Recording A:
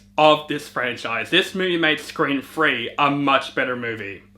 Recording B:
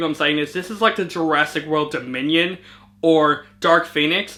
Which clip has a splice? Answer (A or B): A